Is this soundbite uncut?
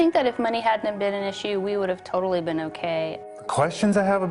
no; 1 cut; at 2.9 s

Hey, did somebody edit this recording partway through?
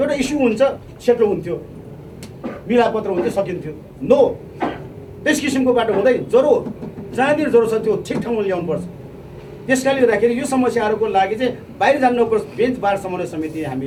no; 0 cuts

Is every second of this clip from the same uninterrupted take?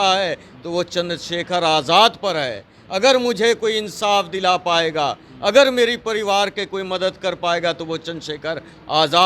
yes; 0 cuts

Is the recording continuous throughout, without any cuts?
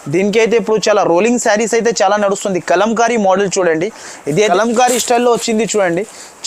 no; 1 cut; at 4.2 s

